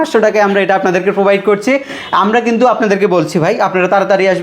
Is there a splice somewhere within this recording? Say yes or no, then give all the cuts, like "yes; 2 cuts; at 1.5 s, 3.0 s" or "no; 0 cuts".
no; 0 cuts